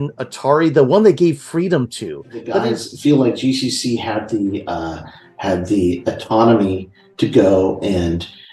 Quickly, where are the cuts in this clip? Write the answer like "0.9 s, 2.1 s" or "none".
2.8 s